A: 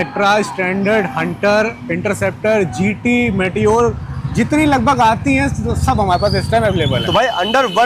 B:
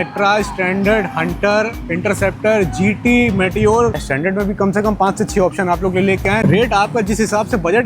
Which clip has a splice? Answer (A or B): B